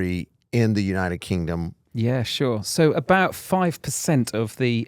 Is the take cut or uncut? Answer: cut